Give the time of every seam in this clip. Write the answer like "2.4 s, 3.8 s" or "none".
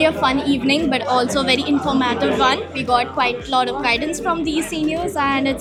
none